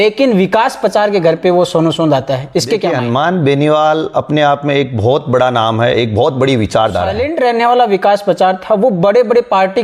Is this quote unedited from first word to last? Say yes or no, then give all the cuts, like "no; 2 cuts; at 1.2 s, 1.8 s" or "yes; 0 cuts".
no; 2 cuts; at 2.9 s, 7.2 s